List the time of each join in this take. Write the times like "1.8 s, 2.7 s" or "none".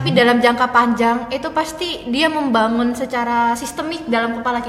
none